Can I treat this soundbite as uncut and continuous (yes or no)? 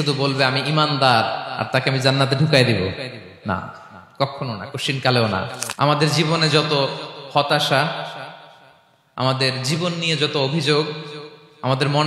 no